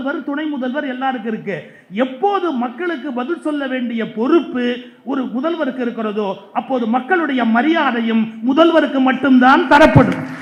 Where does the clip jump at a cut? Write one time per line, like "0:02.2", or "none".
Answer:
none